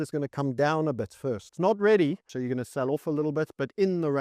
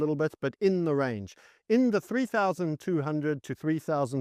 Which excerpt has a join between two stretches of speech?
first; 2 cuts; at 1.5 s, 2.2 s

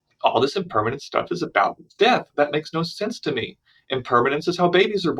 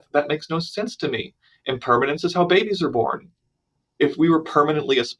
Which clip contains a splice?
second; 1 cut; at 4.0 s

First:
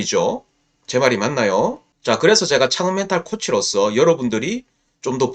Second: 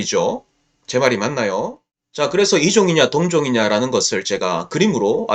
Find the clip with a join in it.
second; 1 cut; at 1.9 s

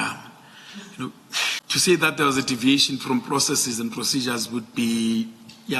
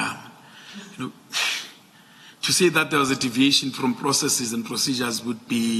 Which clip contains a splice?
first; 1 cut; at 1.6 s

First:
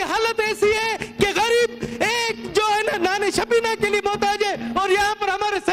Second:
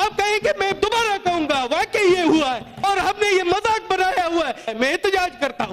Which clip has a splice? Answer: second; 2 cuts; at 2.8 s, 4.7 s

